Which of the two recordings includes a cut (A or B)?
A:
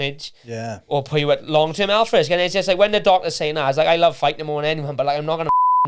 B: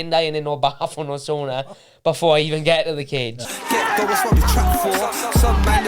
B